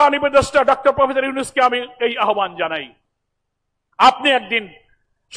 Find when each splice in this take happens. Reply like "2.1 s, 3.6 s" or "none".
none